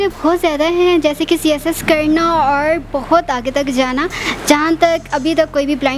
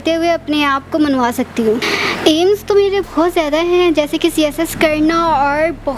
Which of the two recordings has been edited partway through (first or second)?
second